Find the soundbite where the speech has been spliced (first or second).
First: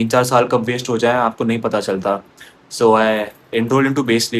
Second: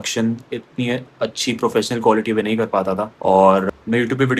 second